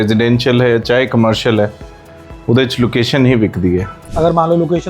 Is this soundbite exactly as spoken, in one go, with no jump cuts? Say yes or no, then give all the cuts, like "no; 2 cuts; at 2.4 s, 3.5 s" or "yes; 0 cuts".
no; 1 cut; at 4.0 s